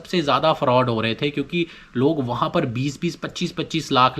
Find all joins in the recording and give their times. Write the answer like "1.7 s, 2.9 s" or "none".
none